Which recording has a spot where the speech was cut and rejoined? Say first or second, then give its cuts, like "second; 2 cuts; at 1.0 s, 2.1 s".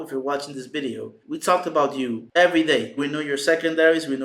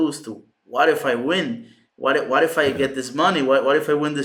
first; 3 cuts; at 1.1 s, 2.2 s, 3.0 s